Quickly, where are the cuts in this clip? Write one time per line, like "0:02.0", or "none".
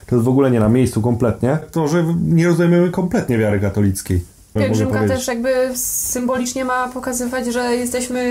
0:01.7
0:04.6